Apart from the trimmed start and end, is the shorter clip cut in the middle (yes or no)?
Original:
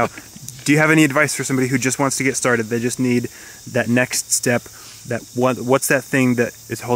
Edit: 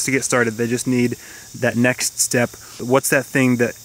yes